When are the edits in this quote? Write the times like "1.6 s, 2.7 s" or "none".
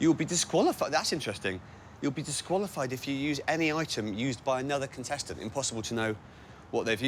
none